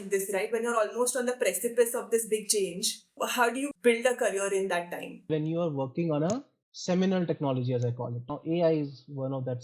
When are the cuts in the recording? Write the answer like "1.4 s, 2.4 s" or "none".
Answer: 3.7 s, 5.3 s, 8.3 s